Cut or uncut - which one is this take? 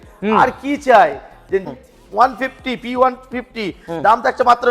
cut